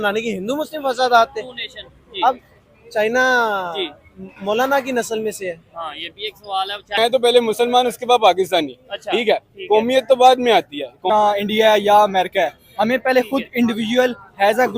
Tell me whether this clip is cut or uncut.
cut